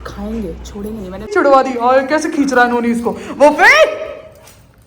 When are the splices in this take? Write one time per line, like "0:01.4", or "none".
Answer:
0:01.3